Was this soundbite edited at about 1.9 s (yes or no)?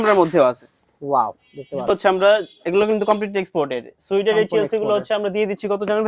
yes